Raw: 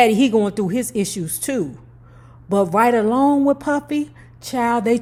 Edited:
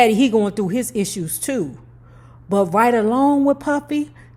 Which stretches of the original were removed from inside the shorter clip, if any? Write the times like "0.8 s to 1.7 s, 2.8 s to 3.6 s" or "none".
none